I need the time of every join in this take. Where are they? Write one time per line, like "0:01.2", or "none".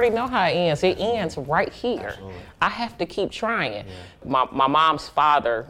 0:04.2